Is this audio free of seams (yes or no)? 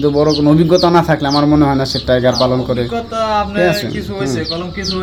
yes